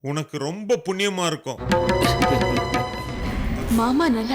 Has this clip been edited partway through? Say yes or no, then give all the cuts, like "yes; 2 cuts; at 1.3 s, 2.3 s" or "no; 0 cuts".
yes; 1 cut; at 3.4 s